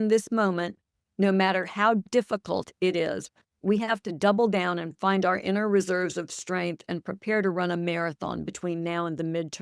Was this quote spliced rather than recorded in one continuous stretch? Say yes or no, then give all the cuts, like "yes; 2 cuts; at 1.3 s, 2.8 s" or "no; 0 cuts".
no; 0 cuts